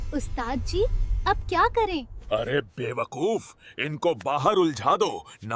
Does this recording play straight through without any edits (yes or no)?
yes